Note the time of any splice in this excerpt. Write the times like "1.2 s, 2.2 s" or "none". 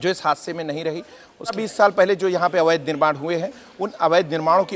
1.6 s